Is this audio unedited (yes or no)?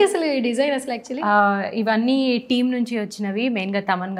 yes